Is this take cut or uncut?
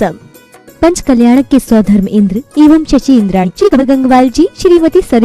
cut